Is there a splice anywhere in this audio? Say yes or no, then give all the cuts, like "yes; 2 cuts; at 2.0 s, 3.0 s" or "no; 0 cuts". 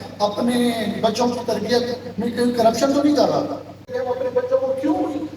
yes; 1 cut; at 3.9 s